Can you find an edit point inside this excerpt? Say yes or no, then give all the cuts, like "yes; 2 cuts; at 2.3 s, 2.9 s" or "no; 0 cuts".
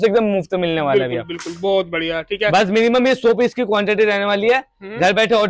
no; 0 cuts